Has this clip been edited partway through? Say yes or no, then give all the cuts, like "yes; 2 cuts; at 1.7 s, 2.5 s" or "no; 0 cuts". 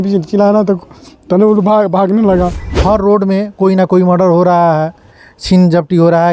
yes; 1 cut; at 2.7 s